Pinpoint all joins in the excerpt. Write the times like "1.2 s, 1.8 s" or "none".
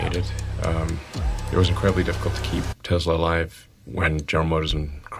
none